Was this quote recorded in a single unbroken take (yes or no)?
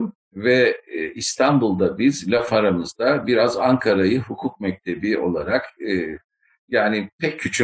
yes